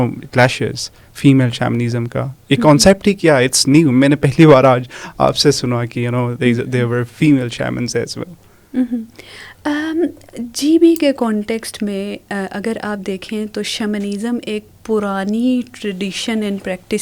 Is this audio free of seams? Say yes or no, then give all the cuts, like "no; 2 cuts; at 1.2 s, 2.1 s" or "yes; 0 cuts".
yes; 0 cuts